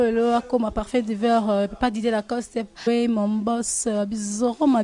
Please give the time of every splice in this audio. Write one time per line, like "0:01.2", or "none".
none